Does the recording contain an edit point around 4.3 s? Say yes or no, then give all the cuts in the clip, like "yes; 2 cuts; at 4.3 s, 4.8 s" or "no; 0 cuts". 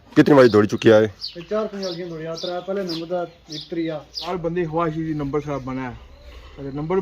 yes; 1 cut; at 4.3 s